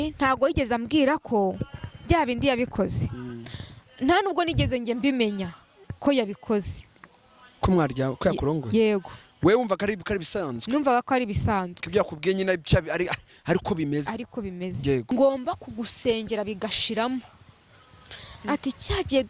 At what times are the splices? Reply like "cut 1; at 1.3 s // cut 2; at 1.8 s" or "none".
cut 1; at 15.1 s